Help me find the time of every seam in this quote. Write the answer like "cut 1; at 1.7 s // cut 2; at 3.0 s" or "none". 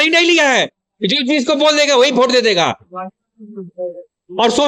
none